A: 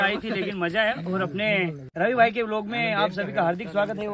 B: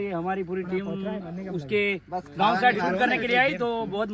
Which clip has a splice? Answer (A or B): A